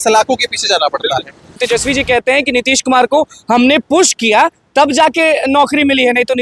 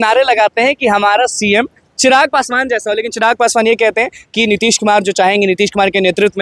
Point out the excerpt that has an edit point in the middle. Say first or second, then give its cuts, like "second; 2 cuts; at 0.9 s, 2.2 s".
first; 1 cut; at 1.6 s